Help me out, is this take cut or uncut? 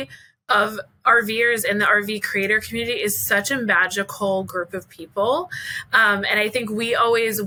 uncut